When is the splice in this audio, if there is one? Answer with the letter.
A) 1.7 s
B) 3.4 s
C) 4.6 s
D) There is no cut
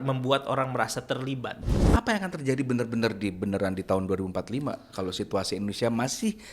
A